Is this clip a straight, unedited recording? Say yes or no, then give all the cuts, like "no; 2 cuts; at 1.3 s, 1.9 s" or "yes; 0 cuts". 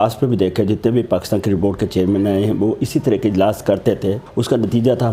no; 1 cut; at 4.2 s